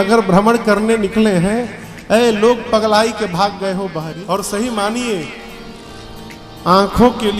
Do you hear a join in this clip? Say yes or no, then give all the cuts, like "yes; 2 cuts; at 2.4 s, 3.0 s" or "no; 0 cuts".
yes; 1 cut; at 4.0 s